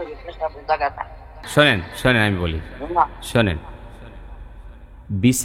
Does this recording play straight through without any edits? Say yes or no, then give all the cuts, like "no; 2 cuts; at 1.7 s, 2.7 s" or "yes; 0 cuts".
no; 1 cut; at 1.5 s